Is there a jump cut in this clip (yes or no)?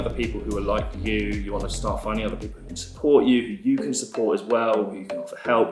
no